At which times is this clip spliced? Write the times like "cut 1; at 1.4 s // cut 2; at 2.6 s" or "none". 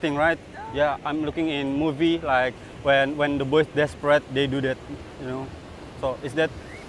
none